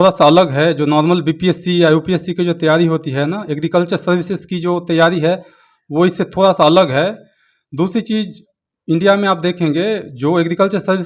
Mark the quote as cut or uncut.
uncut